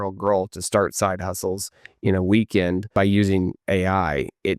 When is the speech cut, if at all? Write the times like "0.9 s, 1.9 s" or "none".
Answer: 2.9 s